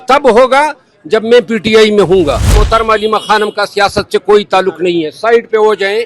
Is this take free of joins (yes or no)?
no